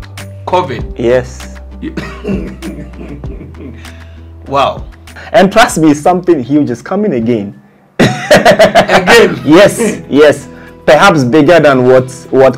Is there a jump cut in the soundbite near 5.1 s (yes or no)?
yes